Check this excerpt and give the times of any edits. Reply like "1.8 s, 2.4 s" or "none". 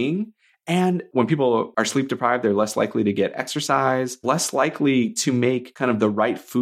1.0 s, 1.7 s, 4.2 s, 5.7 s